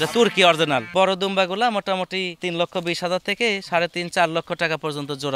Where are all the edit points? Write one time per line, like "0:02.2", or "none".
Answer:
0:00.9
0:02.4